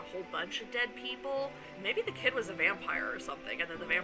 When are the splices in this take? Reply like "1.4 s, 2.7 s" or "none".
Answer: 1.7 s